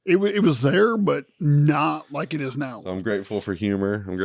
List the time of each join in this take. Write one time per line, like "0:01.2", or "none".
0:02.9